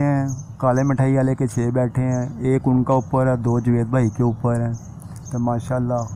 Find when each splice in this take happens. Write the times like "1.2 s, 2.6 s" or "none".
none

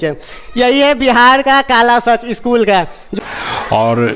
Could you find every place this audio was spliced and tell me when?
3.1 s

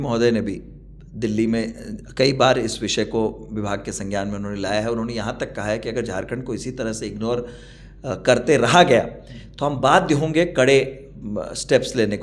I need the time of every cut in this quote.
none

